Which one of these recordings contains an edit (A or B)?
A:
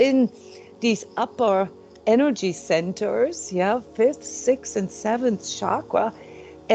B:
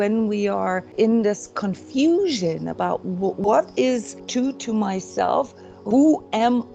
B